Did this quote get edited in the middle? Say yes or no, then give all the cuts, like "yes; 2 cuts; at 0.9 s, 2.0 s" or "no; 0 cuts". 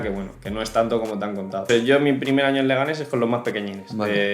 yes; 1 cut; at 1.7 s